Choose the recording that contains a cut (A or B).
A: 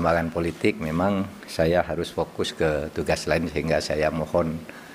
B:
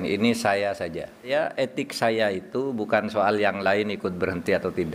B